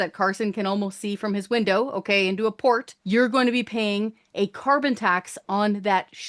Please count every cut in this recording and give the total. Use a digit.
1